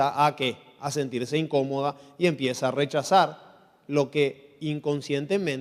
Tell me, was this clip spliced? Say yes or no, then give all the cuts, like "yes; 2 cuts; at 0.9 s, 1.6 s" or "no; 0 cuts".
no; 0 cuts